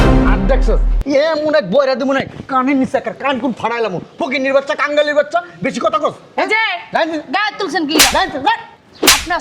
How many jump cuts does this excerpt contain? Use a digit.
0